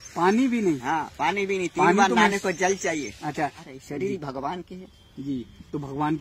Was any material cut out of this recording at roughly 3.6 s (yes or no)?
yes